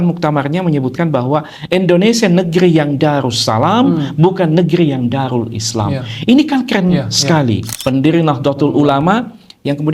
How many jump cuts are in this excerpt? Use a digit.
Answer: 1